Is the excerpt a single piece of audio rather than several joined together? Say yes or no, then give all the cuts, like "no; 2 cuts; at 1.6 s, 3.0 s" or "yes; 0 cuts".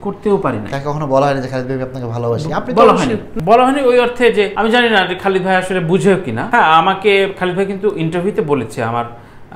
no; 3 cuts; at 3.3 s, 4.5 s, 6.4 s